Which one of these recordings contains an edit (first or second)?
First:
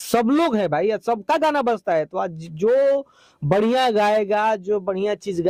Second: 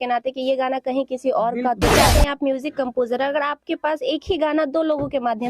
second